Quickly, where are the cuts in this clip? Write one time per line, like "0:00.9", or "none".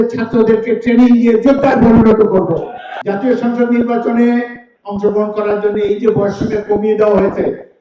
0:02.9